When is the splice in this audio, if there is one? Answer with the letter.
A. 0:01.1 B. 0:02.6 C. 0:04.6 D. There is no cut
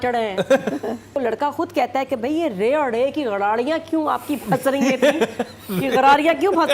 A